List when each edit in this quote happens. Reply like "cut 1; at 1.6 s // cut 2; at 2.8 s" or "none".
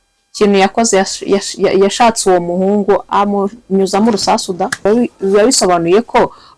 cut 1; at 4.9 s